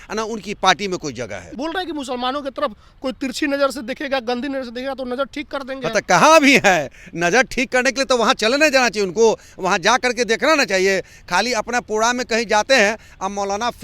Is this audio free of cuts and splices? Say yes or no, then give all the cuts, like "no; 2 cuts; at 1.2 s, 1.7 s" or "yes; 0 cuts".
no; 1 cut; at 1.5 s